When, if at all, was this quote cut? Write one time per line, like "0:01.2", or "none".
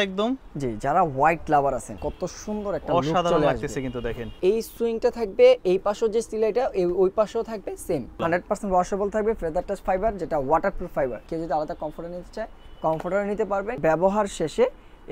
0:02.0
0:04.3
0:08.2
0:11.3
0:13.8